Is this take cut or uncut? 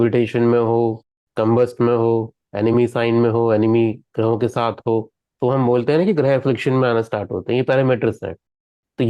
cut